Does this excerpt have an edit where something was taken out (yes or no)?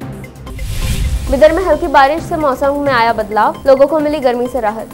no